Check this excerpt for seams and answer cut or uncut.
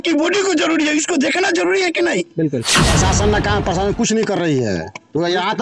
cut